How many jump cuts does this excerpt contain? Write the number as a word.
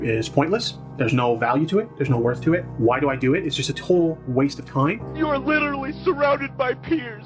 one